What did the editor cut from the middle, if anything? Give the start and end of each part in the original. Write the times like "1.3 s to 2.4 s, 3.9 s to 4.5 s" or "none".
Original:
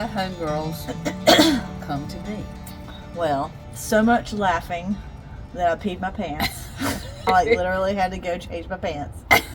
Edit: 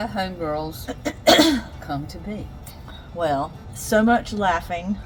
none

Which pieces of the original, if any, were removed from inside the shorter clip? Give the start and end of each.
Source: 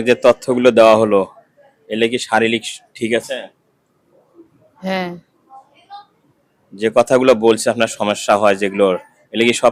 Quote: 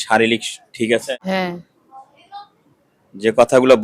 3.4 s to 4.8 s

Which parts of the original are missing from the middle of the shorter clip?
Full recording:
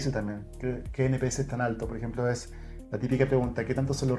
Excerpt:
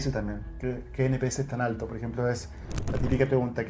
none

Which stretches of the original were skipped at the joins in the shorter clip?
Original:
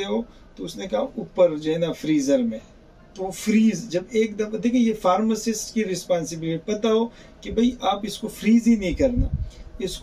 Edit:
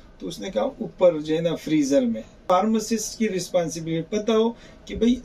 2.8 s to 5.0 s

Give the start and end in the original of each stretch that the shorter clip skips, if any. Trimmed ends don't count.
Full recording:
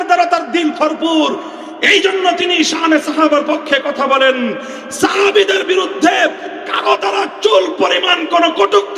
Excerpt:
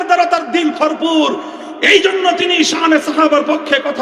none

